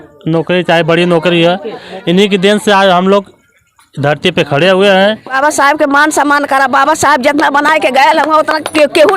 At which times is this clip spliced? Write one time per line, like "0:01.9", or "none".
0:05.4